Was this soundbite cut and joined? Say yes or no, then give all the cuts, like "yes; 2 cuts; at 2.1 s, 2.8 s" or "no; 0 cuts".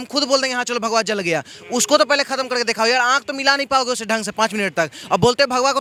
no; 0 cuts